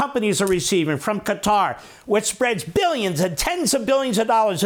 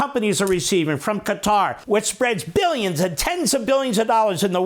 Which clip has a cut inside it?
second; 1 cut; at 1.8 s

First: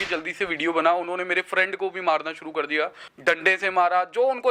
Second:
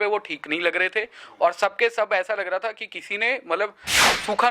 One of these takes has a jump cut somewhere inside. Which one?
first; 1 cut; at 3.0 s

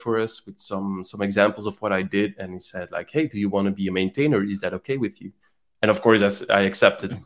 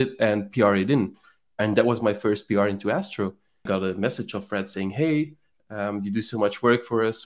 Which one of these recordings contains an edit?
second; 1 cut; at 3.7 s

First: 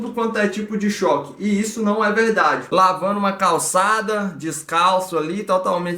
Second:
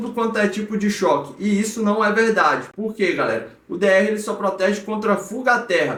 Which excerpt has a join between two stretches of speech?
first; 1 cut; at 2.6 s

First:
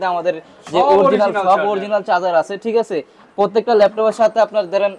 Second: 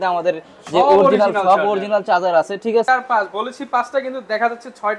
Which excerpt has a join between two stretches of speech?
second; 1 cut; at 2.9 s

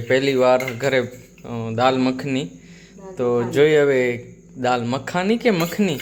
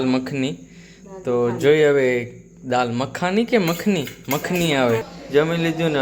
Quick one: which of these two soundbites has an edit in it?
second; 1 cut; at 5.1 s

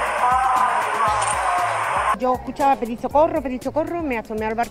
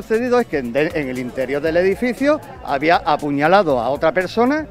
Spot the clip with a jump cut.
first; 1 cut; at 2.2 s

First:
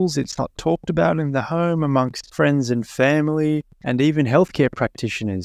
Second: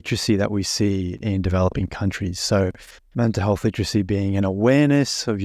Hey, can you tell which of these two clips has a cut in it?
first; 2 cuts; at 2.2 s, 3.7 s

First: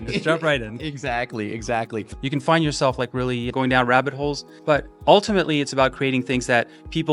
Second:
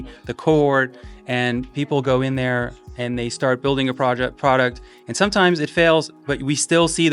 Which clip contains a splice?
first; 2 cuts; at 2.1 s, 4.5 s

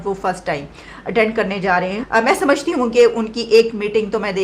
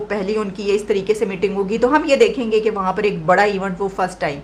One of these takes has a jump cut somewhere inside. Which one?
first; 1 cut; at 2.0 s

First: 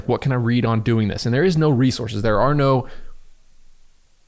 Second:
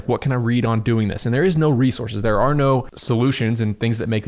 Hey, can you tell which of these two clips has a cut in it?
second; 1 cut; at 2.9 s

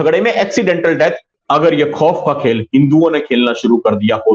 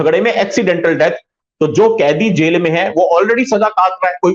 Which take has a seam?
first; 1 cut; at 1.4 s

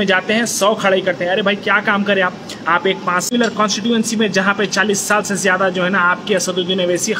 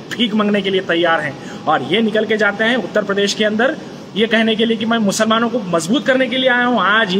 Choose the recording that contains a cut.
first; 1 cut; at 3.3 s

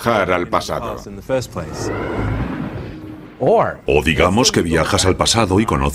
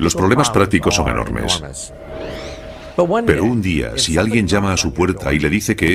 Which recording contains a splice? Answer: first; 1 cut; at 4.3 s

